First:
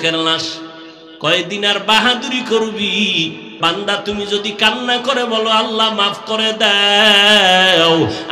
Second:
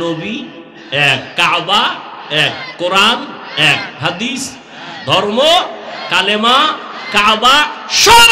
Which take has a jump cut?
first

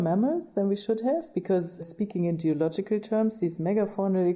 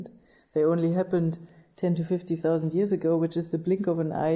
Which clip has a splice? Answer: first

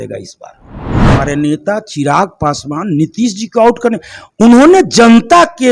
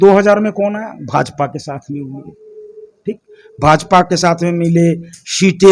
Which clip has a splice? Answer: first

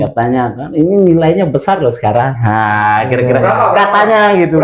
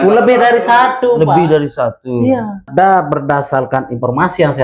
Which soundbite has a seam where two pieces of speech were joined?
second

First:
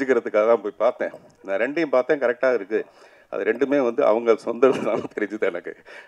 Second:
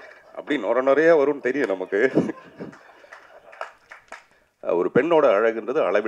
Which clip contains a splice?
second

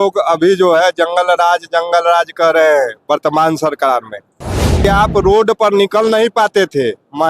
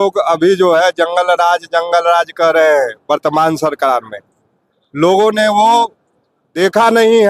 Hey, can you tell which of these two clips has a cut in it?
first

